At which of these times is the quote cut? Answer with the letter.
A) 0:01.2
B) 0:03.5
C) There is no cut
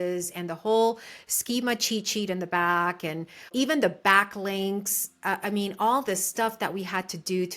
B